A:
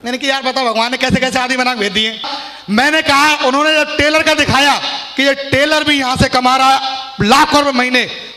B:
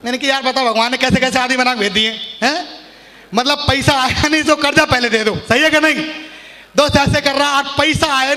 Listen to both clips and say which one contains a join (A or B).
A